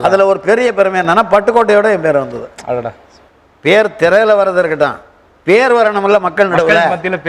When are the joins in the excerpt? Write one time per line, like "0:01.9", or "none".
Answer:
none